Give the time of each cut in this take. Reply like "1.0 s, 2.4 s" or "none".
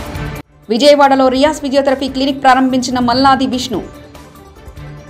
none